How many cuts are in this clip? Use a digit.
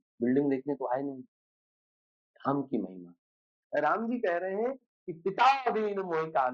1